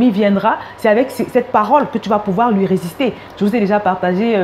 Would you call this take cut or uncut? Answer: cut